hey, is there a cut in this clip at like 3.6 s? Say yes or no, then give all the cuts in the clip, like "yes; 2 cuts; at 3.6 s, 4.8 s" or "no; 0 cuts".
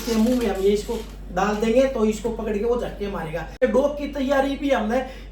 yes; 1 cut; at 3.6 s